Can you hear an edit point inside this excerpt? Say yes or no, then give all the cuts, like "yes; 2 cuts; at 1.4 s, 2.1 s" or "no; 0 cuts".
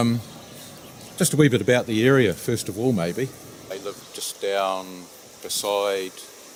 no; 0 cuts